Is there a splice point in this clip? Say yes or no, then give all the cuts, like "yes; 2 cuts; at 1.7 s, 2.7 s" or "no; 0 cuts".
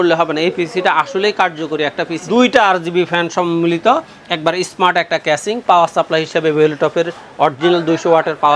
yes; 1 cut; at 2.1 s